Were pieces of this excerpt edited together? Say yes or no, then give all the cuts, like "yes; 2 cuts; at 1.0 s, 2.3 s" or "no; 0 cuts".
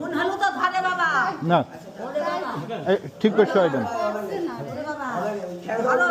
no; 0 cuts